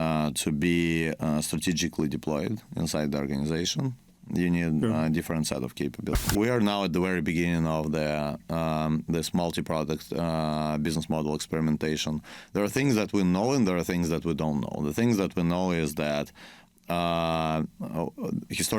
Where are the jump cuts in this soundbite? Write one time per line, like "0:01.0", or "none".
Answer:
0:06.1